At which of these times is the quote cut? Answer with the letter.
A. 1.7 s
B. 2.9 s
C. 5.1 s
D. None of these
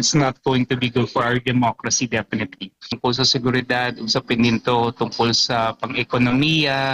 B